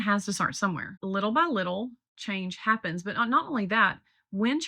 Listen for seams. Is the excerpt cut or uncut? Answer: cut